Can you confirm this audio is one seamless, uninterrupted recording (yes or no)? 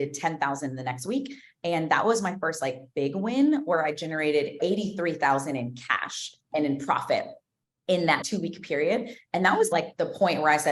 no